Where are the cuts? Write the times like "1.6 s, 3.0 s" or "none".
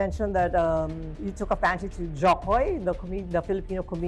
none